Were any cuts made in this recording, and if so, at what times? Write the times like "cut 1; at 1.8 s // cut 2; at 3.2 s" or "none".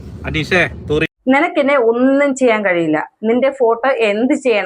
cut 1; at 1.1 s

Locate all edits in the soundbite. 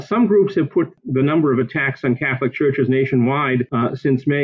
none

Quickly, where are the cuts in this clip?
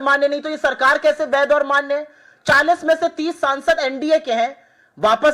none

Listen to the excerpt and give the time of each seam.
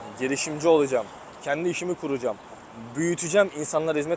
none

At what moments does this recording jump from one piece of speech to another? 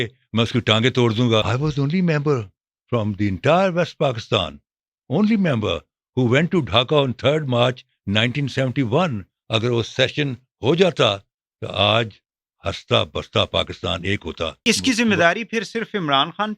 cut 1; at 1.5 s // cut 2; at 14.6 s

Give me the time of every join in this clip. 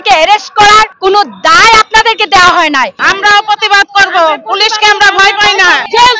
cut 1; at 0.9 s // cut 2; at 3.0 s

